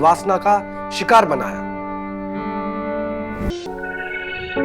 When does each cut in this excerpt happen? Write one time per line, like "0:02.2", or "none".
0:03.5